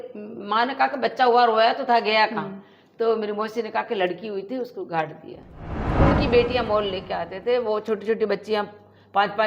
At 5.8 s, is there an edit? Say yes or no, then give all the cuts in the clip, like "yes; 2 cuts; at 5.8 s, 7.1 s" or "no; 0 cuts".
yes; 1 cut; at 5.8 s